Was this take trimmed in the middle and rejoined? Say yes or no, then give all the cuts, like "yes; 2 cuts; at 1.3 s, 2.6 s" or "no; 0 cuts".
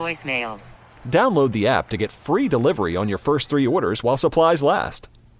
no; 0 cuts